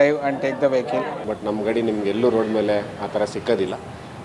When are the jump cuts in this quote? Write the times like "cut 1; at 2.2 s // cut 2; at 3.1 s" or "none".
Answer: cut 1; at 1.2 s